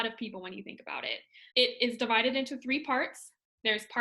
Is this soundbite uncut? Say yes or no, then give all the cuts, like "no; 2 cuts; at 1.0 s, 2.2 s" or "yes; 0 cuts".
no; 1 cut; at 1.4 s